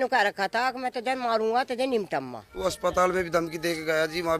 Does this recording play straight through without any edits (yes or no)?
no